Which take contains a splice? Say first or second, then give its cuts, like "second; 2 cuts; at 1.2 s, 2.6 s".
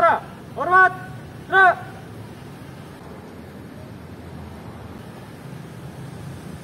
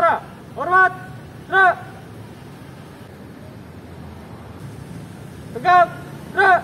second; 2 cuts; at 3.0 s, 4.6 s